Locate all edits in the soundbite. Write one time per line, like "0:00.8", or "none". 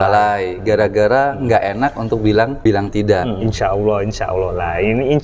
0:03.4